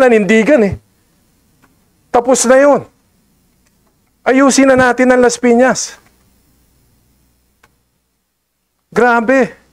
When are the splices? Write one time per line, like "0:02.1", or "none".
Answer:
none